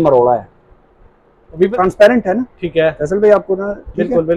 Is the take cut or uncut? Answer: cut